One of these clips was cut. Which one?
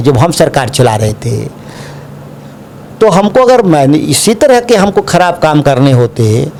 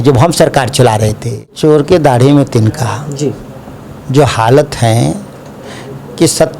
second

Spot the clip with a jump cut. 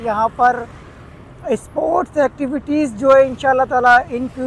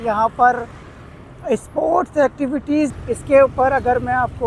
second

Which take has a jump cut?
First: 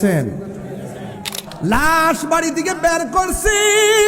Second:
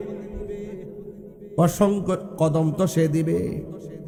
first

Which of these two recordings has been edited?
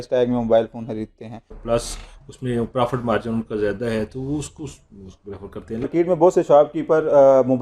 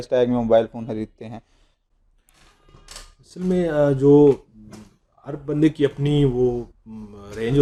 first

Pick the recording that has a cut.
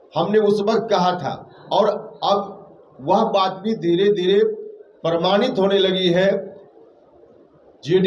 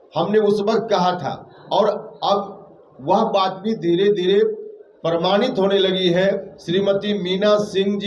second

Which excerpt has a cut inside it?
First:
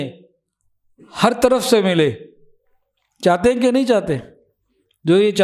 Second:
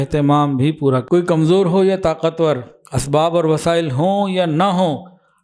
second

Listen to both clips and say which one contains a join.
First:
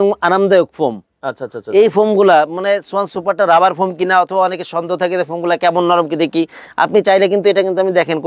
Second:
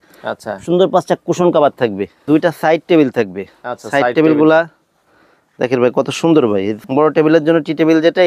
second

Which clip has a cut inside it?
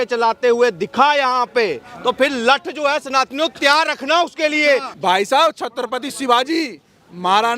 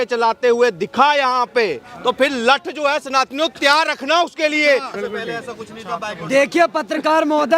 first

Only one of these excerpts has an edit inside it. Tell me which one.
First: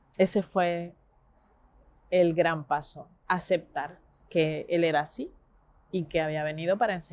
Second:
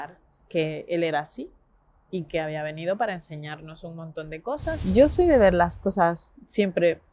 second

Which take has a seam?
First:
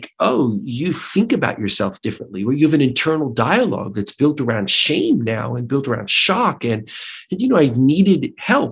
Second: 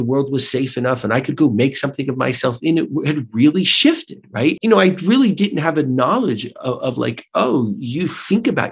second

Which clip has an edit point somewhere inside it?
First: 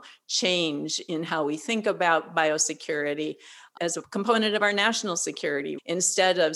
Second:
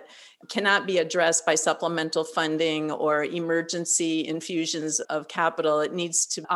first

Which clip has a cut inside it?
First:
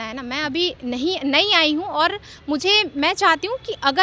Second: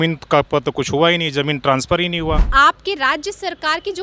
second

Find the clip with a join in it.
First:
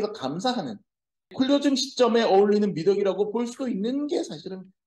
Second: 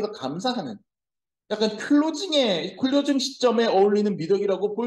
first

